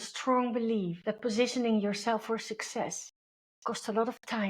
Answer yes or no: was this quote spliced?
yes